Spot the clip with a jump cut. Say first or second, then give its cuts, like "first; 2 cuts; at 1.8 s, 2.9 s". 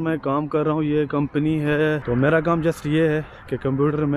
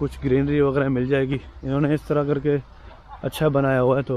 first; 1 cut; at 2.0 s